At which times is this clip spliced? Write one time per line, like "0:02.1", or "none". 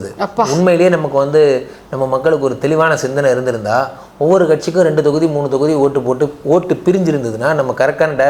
none